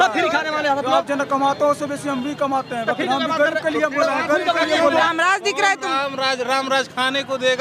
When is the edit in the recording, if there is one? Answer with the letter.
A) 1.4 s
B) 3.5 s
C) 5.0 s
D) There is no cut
C